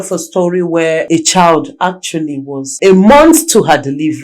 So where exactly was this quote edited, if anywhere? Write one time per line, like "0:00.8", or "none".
0:01.0
0:02.7